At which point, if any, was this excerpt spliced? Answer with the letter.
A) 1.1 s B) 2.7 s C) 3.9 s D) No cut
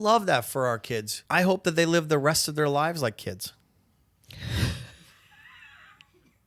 A